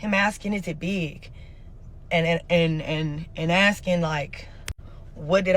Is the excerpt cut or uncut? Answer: uncut